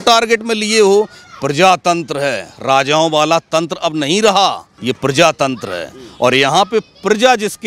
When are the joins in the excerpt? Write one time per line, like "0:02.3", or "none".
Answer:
0:04.7